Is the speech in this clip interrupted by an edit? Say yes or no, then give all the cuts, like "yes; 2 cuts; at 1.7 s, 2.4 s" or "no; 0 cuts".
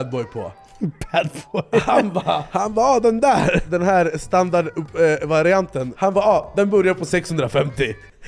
yes; 3 cuts; at 2.5 s, 3.6 s, 5.8 s